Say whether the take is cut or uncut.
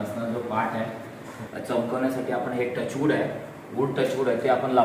cut